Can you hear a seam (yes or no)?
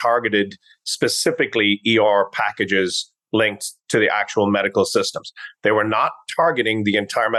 no